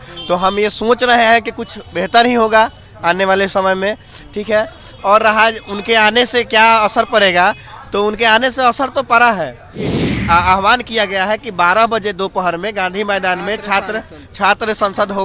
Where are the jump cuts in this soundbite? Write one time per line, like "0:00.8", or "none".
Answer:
0:09.9